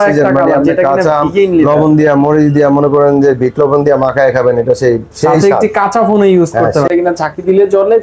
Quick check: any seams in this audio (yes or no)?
yes